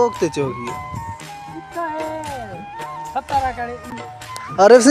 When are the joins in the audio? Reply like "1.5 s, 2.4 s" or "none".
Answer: 4.0 s